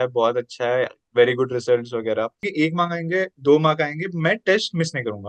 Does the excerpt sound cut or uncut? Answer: cut